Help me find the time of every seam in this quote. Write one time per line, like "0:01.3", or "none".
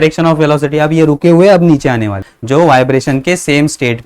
0:02.3